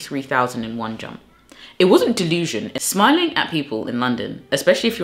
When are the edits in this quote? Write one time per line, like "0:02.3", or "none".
0:02.7